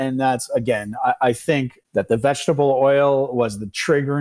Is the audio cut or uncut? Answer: cut